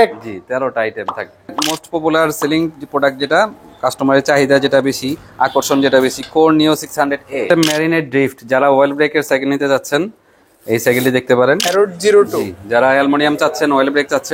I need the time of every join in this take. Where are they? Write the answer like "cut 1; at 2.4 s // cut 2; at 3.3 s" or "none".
cut 1; at 1.7 s // cut 2; at 7.5 s // cut 3; at 11.6 s